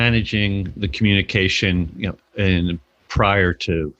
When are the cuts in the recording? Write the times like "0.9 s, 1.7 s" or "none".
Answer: none